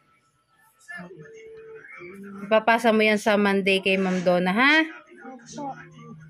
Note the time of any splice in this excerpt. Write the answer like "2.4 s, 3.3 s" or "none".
0.9 s